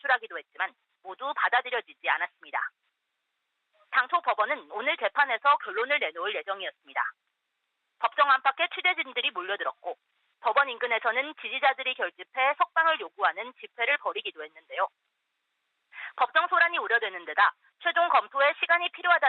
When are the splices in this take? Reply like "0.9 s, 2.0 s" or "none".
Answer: 10.7 s